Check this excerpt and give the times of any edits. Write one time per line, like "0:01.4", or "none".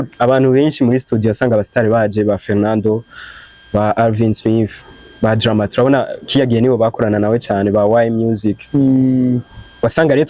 none